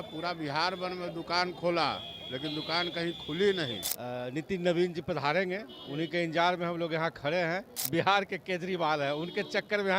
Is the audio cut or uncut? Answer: cut